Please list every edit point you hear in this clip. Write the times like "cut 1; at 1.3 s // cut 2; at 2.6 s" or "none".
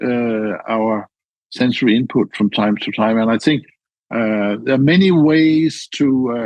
cut 1; at 3.8 s